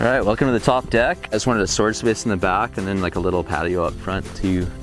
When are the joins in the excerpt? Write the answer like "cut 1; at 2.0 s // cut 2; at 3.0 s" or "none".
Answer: cut 1; at 1.2 s